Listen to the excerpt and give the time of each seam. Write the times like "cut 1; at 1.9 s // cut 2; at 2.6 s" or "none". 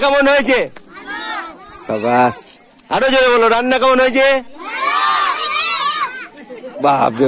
none